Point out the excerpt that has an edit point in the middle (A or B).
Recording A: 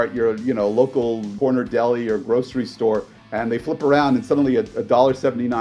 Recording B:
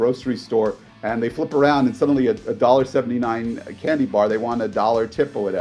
A